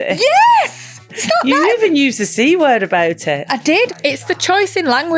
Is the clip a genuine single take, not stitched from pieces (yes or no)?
no